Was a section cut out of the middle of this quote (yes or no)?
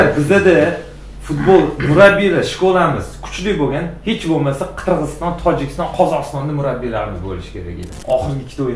yes